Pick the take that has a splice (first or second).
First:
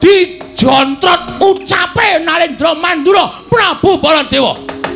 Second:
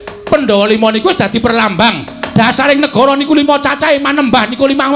first